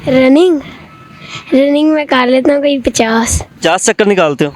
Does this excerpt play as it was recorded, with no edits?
no; 1 cut; at 3.5 s

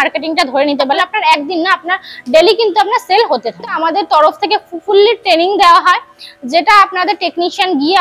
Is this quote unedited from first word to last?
no; 2 cuts; at 1.0 s, 3.8 s

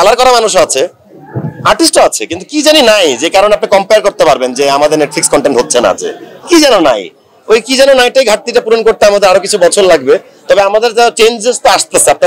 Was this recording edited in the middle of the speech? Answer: no; 0 cuts

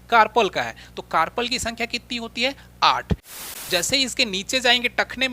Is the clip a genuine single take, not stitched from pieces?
no; 1 cut; at 3.3 s

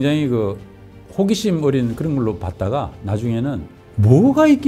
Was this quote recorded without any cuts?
no; 1 cut; at 3.8 s

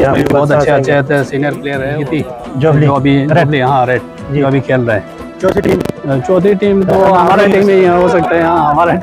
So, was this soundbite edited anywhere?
yes; 1 cut; at 2.0 s

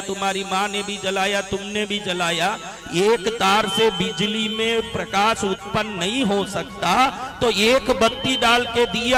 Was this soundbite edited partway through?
no; 0 cuts

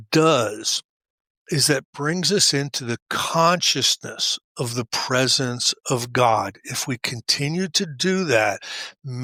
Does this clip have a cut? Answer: no; 0 cuts

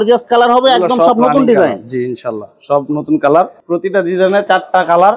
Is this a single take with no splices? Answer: yes; 0 cuts

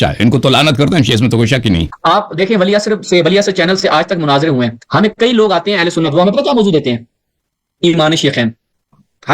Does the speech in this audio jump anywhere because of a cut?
yes; 1 cut; at 1.9 s

